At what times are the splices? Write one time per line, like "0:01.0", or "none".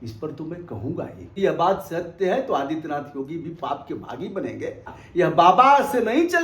0:01.4
0:05.0